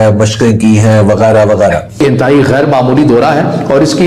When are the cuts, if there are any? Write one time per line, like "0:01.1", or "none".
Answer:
0:01.8